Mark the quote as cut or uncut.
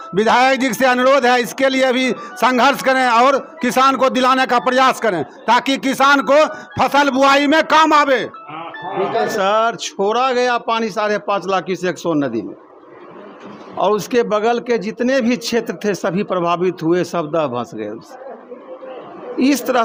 uncut